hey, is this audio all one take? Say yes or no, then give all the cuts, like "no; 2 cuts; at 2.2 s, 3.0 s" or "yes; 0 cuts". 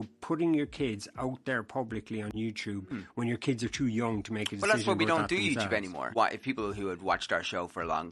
no; 1 cut; at 6.1 s